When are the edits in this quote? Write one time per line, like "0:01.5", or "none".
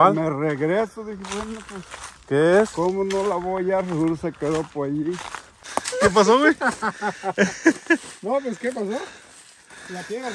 0:05.6